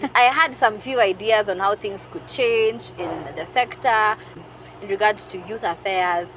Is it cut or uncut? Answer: uncut